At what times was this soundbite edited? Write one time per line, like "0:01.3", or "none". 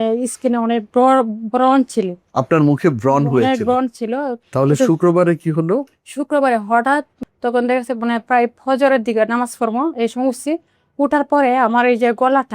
0:04.4
0:07.2